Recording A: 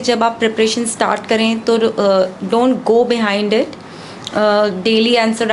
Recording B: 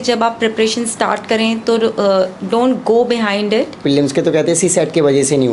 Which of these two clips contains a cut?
B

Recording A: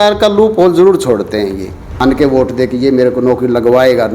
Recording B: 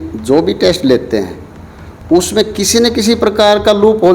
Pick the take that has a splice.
A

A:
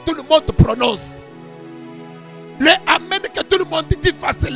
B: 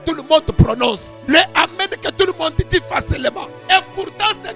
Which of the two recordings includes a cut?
B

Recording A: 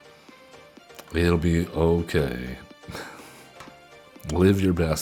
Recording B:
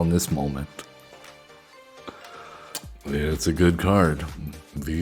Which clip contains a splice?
B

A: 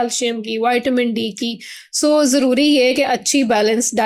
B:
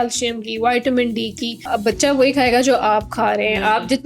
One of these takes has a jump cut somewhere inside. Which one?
B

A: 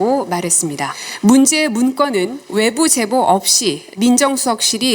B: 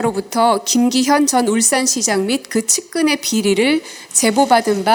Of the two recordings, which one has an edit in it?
A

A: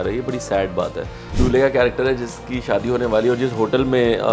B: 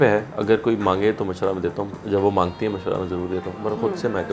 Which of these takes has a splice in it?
A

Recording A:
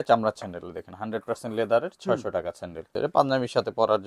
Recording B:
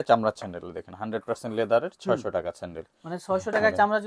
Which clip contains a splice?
A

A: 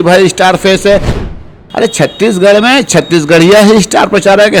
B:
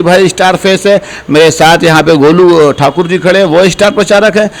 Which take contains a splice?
A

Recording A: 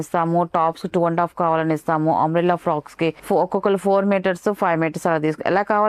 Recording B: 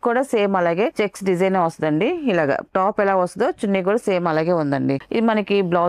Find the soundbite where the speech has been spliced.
B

